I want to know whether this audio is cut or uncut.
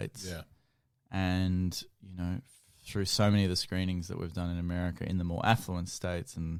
uncut